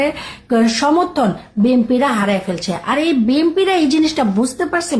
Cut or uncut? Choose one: uncut